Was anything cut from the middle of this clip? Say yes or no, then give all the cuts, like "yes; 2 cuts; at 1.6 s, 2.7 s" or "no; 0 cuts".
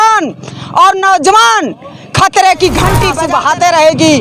yes; 1 cut; at 3.2 s